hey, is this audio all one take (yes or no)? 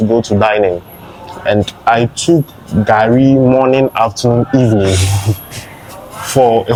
yes